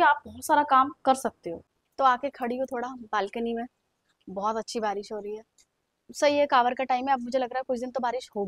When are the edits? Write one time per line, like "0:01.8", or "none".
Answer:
none